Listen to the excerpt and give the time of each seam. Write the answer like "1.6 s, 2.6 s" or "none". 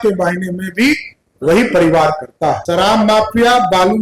2.6 s

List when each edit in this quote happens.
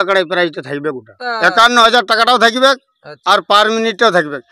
1.2 s

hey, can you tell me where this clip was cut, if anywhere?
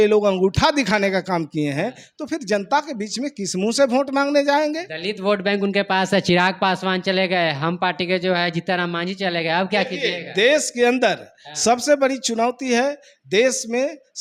none

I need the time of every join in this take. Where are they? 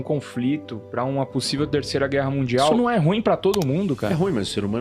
2.7 s, 4.1 s

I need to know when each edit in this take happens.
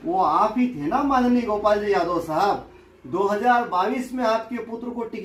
none

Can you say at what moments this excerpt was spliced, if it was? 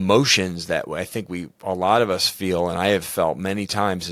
none

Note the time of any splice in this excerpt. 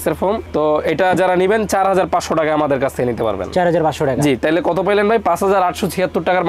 none

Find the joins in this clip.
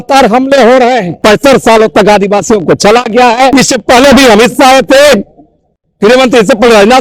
1.2 s, 3.5 s

